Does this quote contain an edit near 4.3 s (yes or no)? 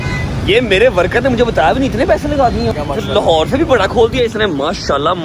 no